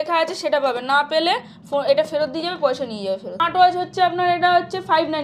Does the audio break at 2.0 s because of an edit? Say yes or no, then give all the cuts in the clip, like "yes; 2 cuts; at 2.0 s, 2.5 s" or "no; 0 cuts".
no; 1 cut; at 3.3 s